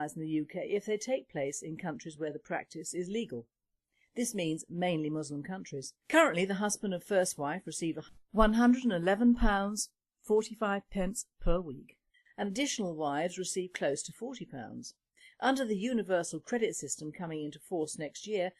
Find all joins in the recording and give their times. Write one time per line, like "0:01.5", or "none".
0:15.9